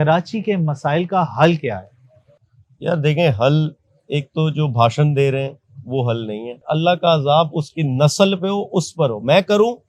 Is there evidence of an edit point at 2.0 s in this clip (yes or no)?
no